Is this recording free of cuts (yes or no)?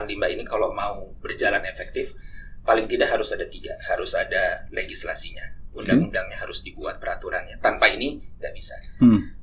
yes